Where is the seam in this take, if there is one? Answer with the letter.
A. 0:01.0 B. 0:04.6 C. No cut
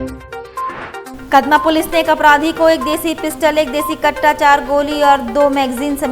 A